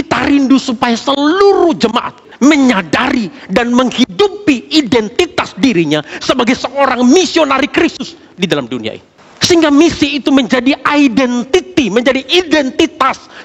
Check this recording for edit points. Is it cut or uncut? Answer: cut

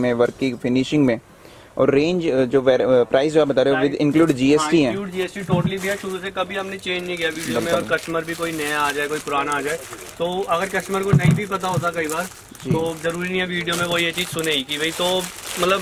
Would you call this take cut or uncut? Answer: uncut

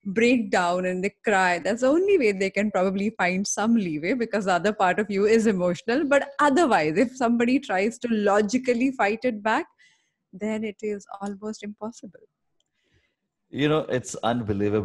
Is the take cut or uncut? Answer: uncut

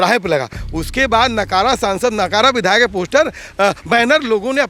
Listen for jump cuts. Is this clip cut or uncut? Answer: uncut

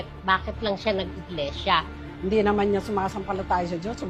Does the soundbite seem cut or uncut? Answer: uncut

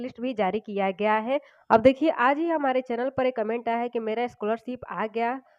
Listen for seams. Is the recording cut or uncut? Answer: cut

